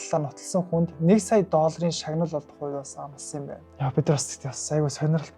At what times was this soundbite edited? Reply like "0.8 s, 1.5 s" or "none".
3.6 s